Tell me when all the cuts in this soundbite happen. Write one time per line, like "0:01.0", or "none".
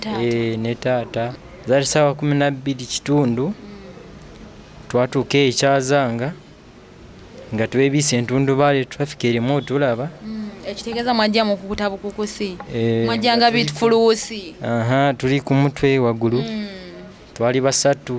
0:01.4

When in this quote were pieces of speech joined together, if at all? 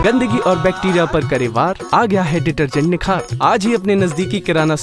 none

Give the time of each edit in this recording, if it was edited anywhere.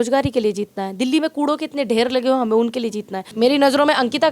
0:03.2

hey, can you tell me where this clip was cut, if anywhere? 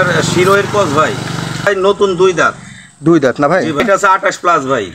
0:01.7
0:03.8

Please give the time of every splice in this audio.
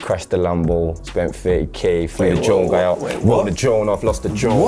0:01.0

